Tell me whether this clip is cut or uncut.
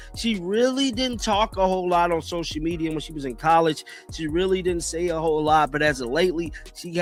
uncut